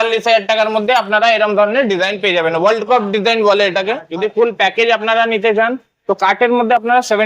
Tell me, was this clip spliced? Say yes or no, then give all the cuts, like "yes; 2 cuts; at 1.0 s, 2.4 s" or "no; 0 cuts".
yes; 1 cut; at 4.1 s